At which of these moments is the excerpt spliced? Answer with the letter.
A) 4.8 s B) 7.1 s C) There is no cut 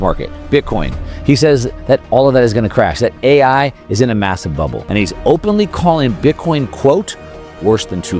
A